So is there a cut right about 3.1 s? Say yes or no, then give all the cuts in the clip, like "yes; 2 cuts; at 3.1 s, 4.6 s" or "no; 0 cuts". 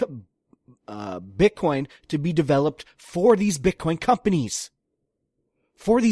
no; 0 cuts